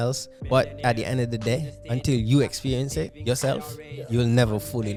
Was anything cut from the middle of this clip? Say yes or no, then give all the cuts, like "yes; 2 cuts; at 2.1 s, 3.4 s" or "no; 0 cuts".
no; 0 cuts